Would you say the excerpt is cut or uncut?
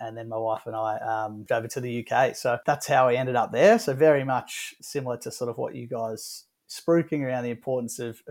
cut